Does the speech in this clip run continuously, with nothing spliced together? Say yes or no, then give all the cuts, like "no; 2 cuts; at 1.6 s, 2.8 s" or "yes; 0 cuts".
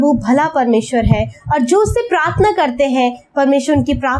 yes; 0 cuts